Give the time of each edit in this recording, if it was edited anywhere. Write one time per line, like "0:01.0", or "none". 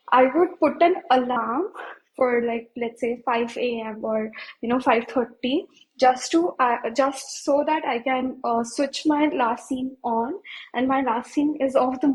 none